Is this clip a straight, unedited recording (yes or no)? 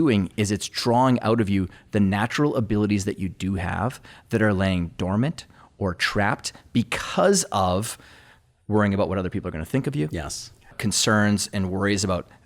no